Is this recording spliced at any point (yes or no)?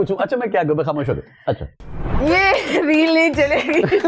yes